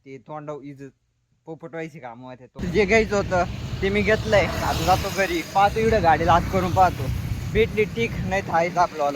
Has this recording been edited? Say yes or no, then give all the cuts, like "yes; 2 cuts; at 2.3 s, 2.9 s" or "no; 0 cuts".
yes; 1 cut; at 2.6 s